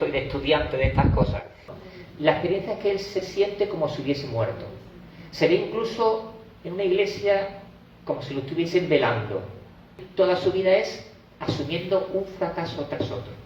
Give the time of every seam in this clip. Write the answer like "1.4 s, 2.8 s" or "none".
1.7 s, 10.0 s